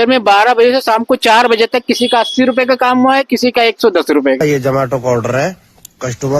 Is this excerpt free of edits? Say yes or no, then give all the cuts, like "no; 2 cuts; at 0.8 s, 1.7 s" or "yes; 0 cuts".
no; 1 cut; at 4.4 s